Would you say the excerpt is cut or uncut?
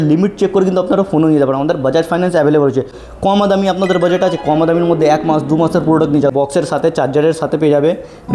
cut